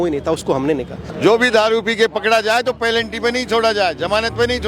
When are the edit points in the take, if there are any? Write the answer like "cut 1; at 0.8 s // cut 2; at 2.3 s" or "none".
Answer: cut 1; at 1.1 s